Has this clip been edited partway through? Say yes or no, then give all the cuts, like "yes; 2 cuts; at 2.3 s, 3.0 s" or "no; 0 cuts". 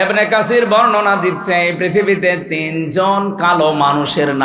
no; 0 cuts